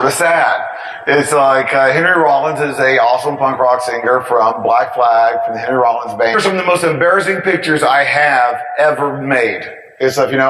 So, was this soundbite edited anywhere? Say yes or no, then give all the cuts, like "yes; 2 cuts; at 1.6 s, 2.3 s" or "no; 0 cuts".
no; 0 cuts